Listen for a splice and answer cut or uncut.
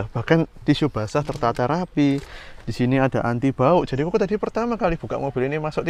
uncut